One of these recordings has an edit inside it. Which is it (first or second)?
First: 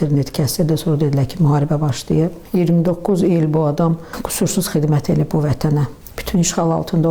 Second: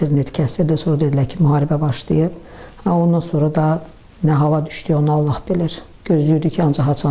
first